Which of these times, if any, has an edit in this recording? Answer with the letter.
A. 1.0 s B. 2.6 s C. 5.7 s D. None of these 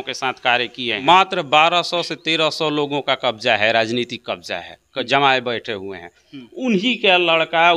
A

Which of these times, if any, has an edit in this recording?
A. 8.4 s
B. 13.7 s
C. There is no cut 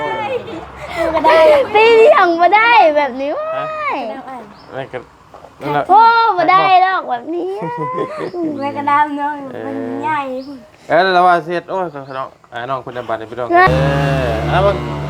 B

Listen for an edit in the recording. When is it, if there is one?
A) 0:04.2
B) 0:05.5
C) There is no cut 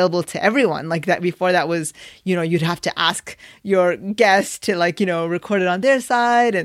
C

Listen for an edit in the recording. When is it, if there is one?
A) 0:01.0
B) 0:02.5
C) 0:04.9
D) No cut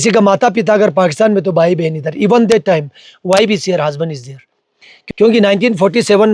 C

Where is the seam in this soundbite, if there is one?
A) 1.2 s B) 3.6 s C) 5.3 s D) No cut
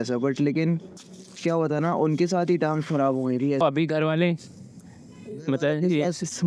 B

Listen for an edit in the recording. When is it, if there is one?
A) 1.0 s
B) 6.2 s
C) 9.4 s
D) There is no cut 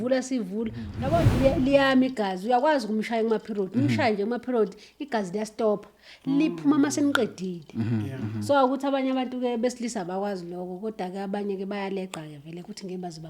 A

